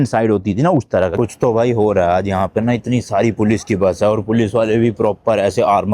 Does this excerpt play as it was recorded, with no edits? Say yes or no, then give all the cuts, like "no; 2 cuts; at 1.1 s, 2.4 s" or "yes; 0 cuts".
no; 1 cut; at 1.1 s